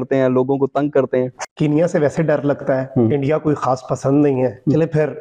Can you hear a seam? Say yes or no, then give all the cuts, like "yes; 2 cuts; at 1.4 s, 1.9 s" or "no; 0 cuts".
yes; 1 cut; at 1.4 s